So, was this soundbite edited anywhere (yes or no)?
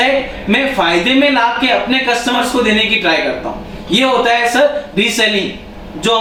no